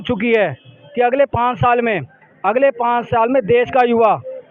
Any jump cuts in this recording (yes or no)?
no